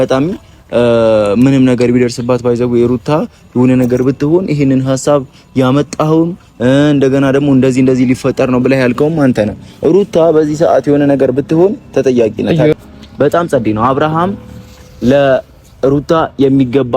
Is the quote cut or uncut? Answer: cut